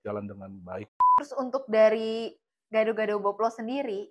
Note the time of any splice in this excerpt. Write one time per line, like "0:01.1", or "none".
0:01.0